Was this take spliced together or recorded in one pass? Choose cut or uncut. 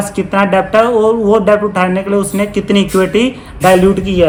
uncut